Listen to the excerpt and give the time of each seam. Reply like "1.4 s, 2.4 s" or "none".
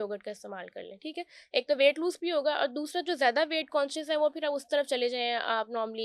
none